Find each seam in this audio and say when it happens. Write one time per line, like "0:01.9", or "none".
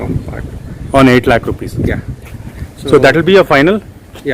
none

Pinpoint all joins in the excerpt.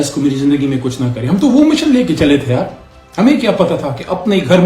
none

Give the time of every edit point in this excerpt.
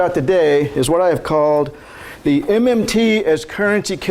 none

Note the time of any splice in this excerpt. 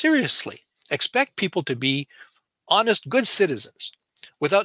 none

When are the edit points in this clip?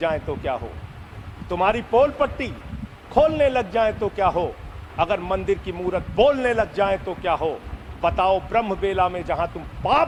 none

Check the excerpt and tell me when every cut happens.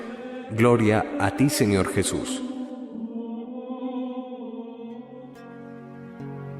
0:01.1

